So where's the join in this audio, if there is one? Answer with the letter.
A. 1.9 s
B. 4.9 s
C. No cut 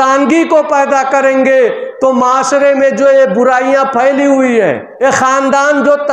B